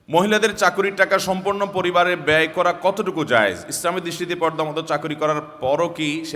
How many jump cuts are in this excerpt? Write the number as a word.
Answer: zero